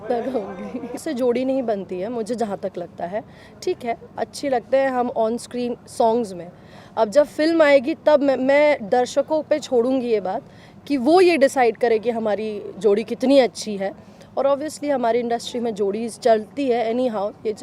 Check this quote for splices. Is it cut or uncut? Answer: cut